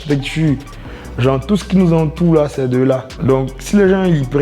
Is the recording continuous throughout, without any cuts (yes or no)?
no